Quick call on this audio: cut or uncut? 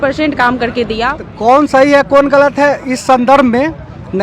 cut